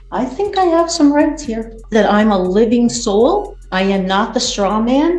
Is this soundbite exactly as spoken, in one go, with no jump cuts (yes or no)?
no